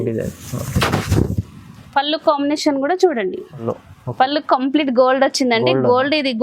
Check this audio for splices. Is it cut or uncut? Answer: cut